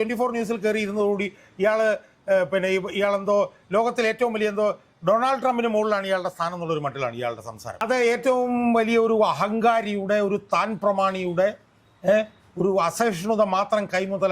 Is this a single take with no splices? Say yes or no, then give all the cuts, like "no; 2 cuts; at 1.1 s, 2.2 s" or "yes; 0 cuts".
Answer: no; 1 cut; at 7.8 s